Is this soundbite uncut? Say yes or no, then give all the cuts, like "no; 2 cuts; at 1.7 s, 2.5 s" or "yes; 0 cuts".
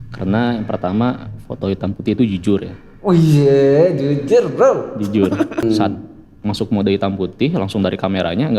no; 1 cut; at 5.6 s